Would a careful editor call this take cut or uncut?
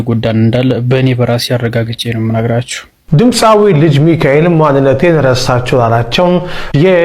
cut